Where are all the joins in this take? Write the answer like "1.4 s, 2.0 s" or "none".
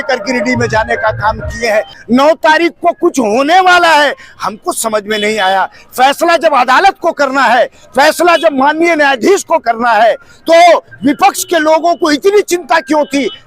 2.0 s

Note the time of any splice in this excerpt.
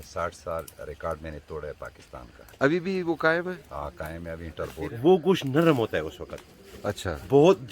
4.9 s

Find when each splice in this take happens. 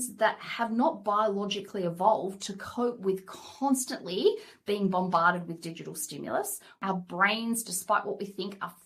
6.8 s

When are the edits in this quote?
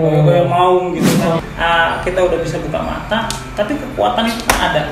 1.4 s

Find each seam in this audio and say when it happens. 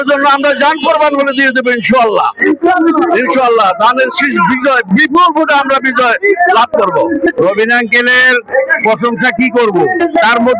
none

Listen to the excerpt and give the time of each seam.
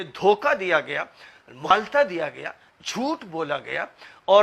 1.7 s

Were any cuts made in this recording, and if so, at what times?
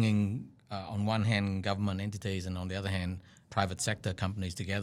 3.4 s

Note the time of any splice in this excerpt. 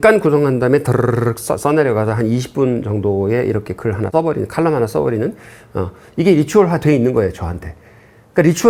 none

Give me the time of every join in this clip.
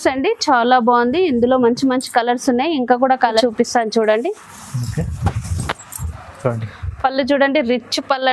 3.4 s

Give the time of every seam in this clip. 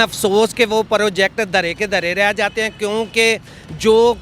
none

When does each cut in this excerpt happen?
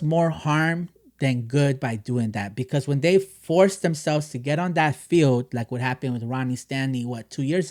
none

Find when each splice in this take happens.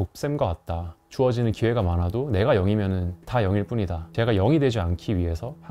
1.0 s, 3.2 s

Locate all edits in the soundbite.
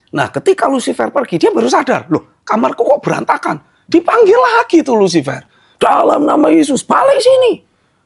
none

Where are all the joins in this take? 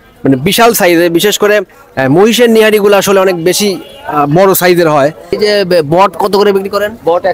5.4 s

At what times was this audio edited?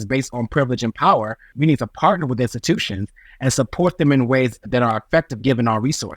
1.5 s, 4.5 s

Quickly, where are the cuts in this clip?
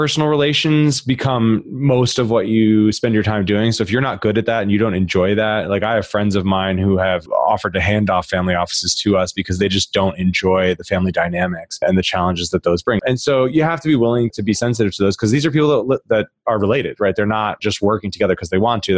7.2 s, 11.8 s, 13.0 s, 14.3 s, 17.6 s

